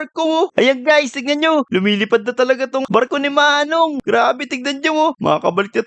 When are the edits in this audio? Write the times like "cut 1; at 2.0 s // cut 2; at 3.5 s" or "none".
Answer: cut 1; at 3.0 s